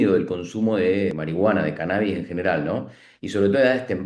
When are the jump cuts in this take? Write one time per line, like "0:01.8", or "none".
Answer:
0:01.2